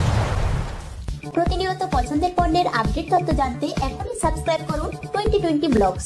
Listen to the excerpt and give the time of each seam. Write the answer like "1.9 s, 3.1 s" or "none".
1.2 s

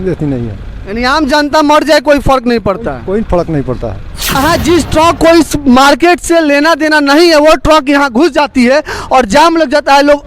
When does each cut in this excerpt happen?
4.4 s

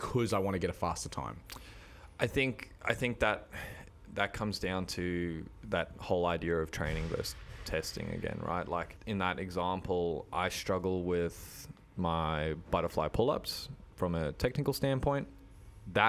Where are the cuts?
8.9 s

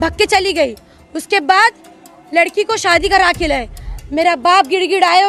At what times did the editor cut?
none

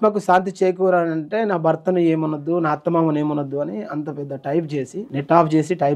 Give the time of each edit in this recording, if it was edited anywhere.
5.0 s

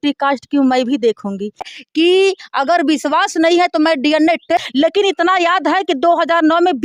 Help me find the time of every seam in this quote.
1.7 s, 4.6 s

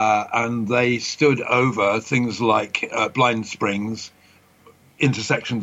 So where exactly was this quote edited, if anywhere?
4.3 s

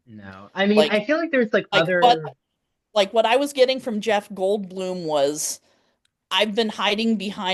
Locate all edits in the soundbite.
none

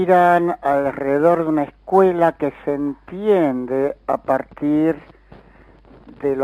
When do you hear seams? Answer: 3.2 s

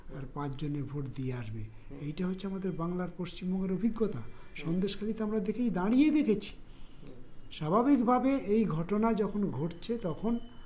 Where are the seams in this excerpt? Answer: none

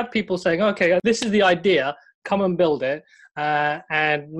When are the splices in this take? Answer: 1.0 s

